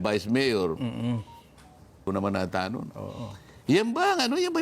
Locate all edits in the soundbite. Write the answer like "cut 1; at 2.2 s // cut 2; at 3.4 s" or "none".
cut 1; at 2.1 s